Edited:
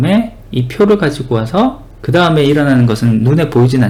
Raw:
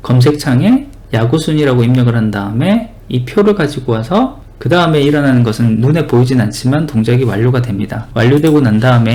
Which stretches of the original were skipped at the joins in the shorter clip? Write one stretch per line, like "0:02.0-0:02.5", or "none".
none